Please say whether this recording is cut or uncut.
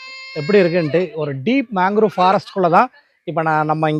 uncut